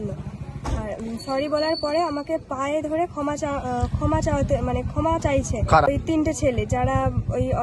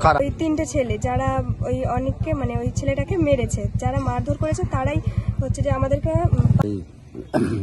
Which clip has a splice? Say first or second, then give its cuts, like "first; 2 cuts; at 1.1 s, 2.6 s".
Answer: second; 1 cut; at 6.7 s